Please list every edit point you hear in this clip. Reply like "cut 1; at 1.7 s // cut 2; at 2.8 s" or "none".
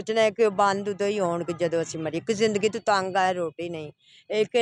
none